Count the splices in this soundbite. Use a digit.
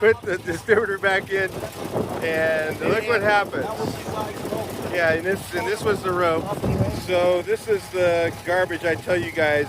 1